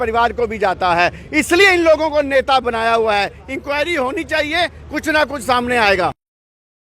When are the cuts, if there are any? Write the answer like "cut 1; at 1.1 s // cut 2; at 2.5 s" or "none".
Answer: none